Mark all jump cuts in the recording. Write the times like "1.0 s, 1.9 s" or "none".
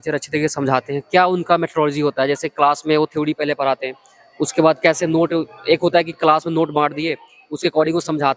none

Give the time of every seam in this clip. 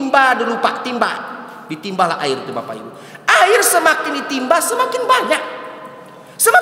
none

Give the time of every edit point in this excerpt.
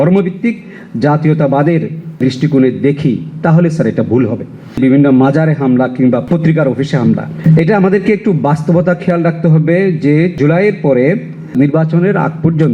4.8 s, 7.3 s

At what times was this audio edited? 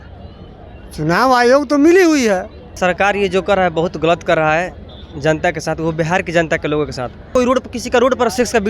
2.6 s, 7.3 s

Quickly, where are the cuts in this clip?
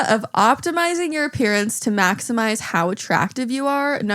none

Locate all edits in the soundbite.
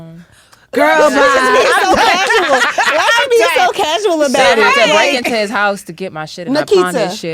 none

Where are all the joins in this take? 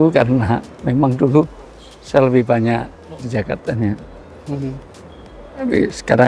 3.2 s

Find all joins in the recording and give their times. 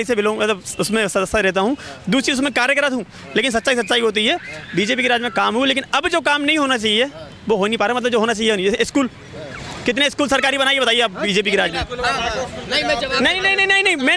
none

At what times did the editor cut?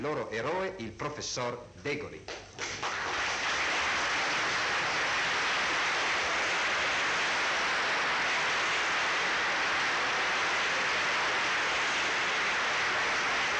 none

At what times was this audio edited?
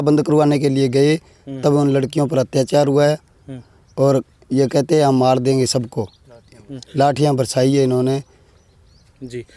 none

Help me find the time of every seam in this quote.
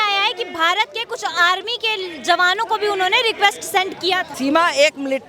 4.3 s

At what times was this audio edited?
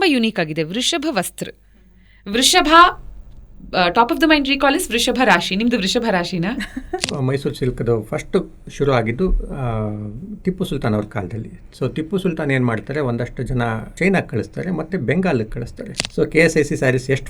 7.0 s, 13.9 s, 15.9 s

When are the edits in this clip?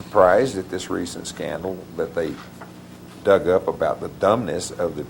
none

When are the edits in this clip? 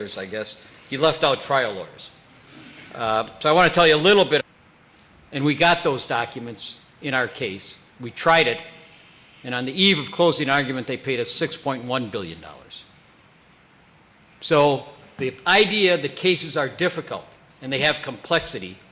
none

